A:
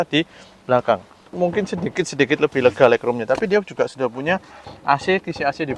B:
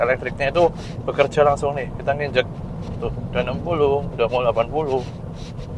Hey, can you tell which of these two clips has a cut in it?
A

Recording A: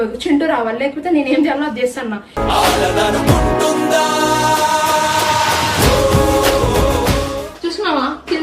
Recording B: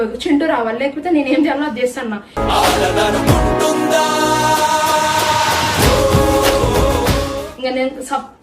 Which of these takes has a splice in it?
A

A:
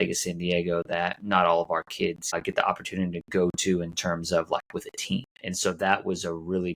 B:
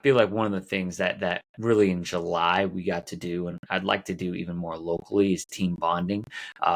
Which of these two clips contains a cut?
A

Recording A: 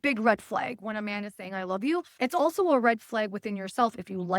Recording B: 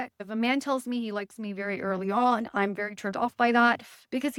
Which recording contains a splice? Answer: A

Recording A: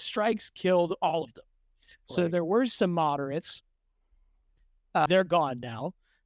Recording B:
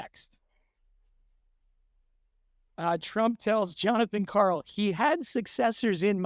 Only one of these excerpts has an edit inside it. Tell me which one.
A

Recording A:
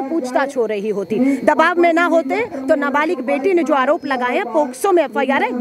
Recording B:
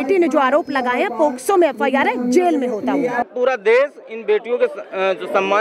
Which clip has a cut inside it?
B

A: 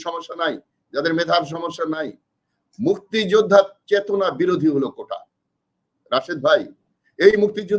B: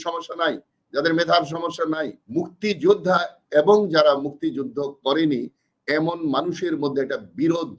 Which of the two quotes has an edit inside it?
B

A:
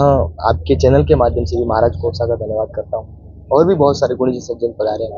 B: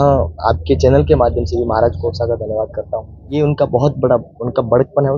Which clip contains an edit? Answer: B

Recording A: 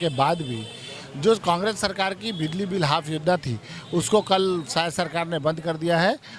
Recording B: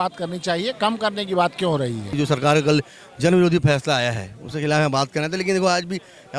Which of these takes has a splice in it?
B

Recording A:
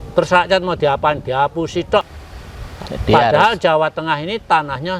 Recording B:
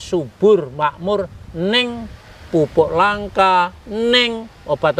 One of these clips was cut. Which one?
A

